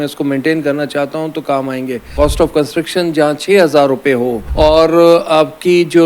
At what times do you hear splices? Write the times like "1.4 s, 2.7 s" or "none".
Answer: 2.1 s, 4.4 s